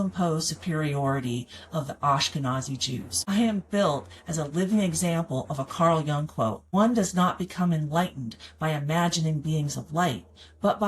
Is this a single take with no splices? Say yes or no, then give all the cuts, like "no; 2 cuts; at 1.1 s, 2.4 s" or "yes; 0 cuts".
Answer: no; 2 cuts; at 3.1 s, 6.6 s